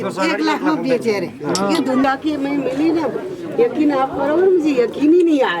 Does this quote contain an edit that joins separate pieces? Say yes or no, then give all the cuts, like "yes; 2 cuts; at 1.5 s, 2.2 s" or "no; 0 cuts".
yes; 1 cut; at 2.0 s